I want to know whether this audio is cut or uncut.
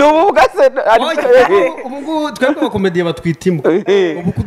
uncut